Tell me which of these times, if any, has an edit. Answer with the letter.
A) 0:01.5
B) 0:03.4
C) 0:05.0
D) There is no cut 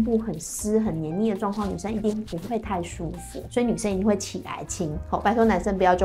B